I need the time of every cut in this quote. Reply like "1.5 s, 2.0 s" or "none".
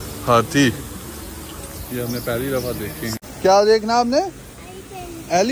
3.2 s